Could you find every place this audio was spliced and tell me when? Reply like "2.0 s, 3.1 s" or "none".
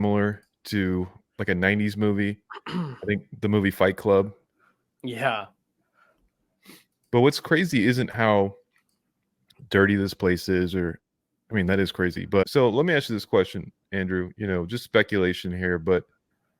12.5 s